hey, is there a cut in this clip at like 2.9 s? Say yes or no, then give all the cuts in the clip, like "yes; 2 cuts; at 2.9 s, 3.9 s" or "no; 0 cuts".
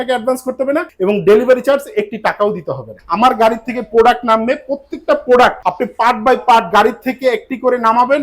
yes; 3 cuts; at 0.9 s, 2.9 s, 5.6 s